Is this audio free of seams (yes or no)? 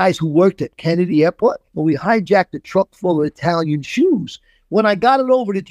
no